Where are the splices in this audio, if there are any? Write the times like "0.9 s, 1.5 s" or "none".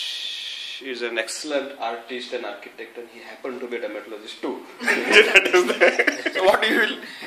6.3 s